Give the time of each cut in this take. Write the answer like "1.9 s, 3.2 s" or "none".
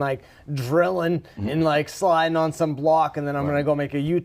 none